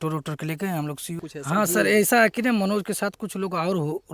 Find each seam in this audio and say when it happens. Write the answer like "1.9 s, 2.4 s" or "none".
1.1 s